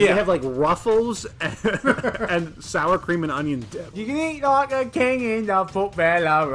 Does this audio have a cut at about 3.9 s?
yes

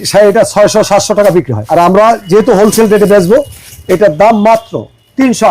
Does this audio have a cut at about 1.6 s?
yes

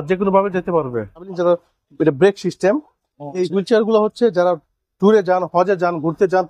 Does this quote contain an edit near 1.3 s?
yes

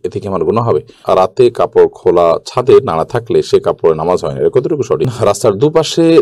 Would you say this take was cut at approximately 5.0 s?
yes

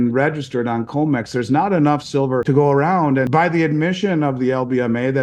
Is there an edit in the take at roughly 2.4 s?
yes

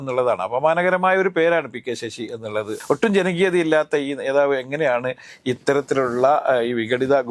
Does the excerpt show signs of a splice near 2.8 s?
yes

